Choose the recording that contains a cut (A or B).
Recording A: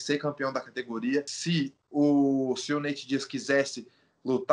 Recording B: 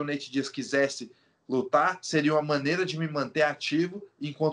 A